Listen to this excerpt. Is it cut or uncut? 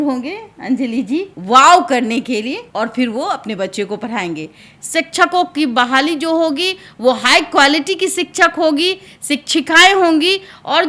cut